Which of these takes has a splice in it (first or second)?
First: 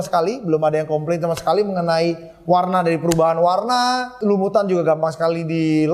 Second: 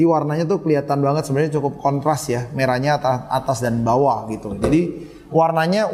first